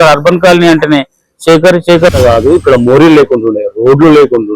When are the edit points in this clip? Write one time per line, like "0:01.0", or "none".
0:02.1